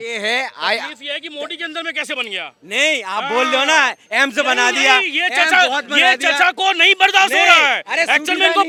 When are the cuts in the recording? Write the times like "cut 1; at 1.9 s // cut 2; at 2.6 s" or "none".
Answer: none